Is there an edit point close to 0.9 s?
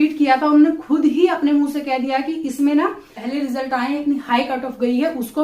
no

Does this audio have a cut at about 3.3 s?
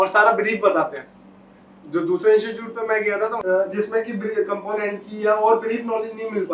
yes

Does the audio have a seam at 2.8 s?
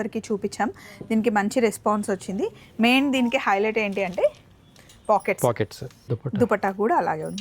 no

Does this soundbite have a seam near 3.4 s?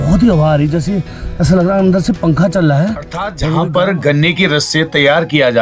yes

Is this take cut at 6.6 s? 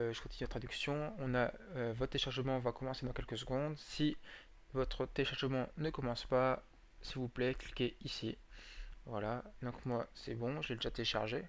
no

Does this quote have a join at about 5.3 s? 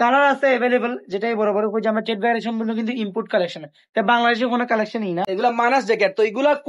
yes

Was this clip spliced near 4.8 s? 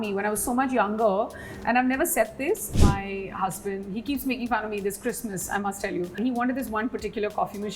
no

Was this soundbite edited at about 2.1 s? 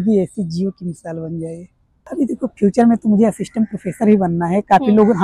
yes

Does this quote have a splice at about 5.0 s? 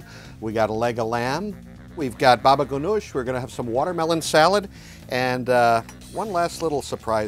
no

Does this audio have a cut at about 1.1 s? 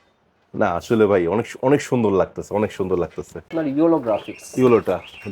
no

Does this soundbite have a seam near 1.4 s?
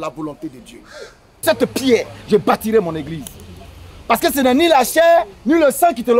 yes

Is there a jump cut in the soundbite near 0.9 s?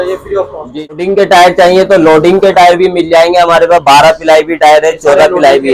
yes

